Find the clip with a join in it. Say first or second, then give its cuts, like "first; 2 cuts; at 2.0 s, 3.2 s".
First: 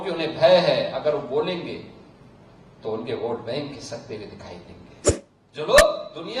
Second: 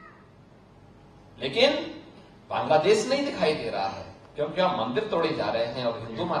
first; 1 cut; at 5.2 s